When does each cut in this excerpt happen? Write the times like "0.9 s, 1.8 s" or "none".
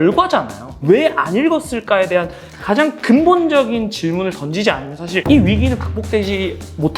none